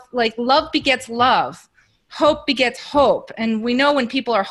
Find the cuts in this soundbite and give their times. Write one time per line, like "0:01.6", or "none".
none